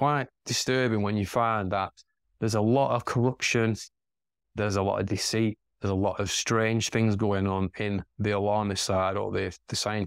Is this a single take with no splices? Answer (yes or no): yes